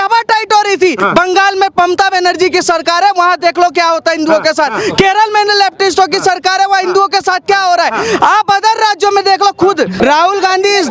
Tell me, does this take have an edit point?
yes; 2 cuts; at 1.0 s, 10.0 s

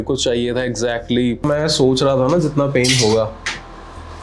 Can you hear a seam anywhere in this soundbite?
yes; 1 cut; at 1.4 s

